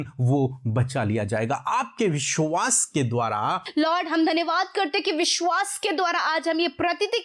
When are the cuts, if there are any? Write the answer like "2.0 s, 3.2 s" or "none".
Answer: 3.6 s